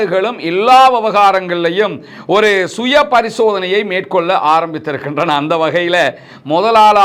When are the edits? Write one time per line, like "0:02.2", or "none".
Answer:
none